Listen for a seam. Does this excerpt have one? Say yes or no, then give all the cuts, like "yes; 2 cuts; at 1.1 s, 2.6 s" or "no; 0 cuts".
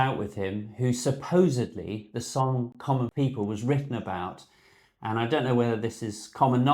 yes; 1 cut; at 3.1 s